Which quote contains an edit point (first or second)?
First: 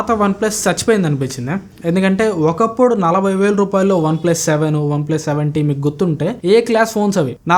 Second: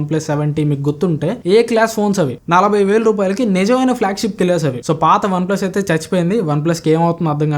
second